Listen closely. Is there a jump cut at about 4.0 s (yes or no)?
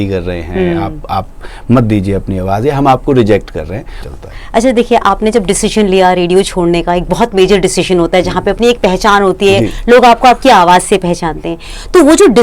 yes